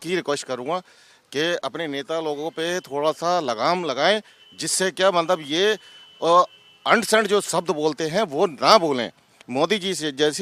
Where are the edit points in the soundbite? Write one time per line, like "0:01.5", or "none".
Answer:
none